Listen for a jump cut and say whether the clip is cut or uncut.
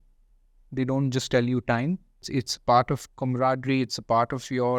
cut